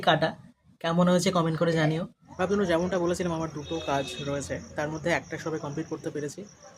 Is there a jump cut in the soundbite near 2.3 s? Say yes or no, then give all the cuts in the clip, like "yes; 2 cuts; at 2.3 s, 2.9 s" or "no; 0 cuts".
yes; 1 cut; at 2.3 s